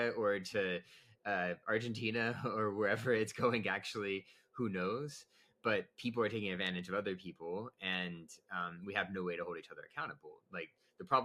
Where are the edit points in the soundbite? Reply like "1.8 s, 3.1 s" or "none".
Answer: none